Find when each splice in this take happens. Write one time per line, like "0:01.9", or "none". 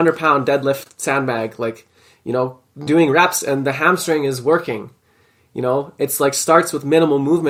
none